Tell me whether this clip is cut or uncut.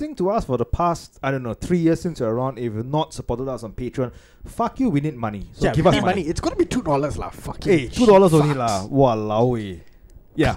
uncut